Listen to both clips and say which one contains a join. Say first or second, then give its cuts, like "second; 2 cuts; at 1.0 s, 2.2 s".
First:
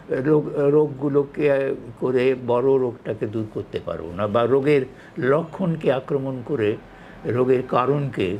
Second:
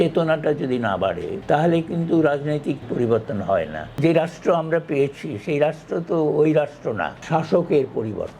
second; 4 cuts; at 1.3 s, 2.8 s, 4.0 s, 7.2 s